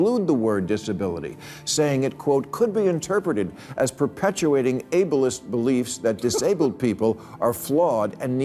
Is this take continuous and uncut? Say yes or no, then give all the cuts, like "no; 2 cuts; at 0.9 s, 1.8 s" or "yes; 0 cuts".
yes; 0 cuts